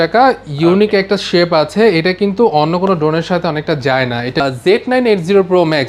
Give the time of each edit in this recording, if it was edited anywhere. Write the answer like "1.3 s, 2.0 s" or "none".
4.4 s